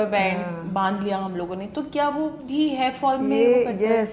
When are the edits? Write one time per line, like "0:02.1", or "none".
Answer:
none